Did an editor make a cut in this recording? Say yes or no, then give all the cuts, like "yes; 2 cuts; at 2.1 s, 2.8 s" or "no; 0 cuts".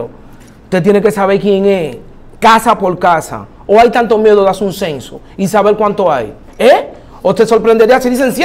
no; 0 cuts